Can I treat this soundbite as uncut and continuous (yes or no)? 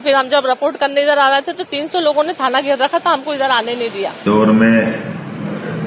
no